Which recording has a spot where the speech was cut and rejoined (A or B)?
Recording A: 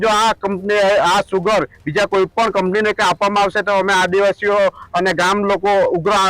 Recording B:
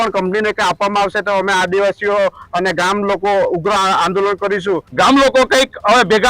B